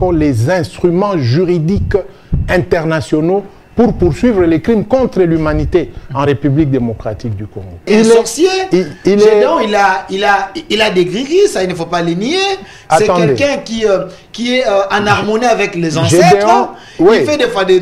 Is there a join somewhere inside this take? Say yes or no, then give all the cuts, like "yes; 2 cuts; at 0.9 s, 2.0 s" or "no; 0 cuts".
yes; 1 cut; at 7.9 s